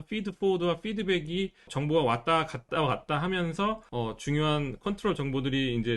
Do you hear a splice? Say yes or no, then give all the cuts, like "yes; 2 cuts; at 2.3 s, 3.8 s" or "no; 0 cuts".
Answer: yes; 3 cuts; at 1.7 s, 2.7 s, 3.8 s